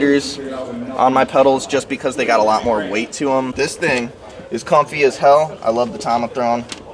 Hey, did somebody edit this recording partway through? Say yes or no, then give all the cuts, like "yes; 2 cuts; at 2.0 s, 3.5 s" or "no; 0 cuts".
yes; 1 cut; at 3.5 s